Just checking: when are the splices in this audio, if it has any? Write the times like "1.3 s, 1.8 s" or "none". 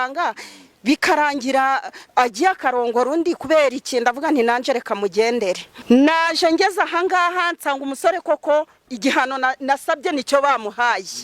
5.7 s